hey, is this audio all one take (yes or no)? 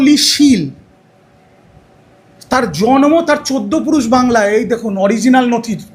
yes